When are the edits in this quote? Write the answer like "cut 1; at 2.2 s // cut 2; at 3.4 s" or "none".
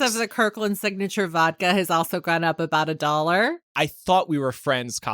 cut 1; at 3.7 s